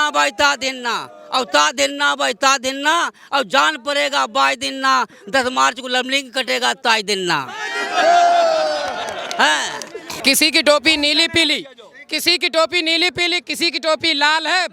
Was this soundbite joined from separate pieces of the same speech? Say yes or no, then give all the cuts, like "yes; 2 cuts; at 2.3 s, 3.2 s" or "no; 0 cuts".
yes; 1 cut; at 10.0 s